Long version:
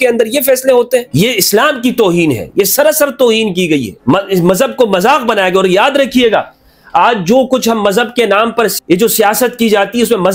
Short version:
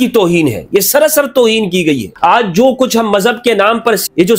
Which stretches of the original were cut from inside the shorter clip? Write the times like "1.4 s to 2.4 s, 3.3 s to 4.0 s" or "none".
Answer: 3.9 s to 6.8 s